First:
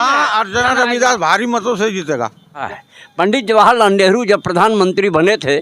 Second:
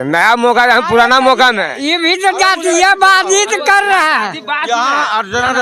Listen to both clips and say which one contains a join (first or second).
first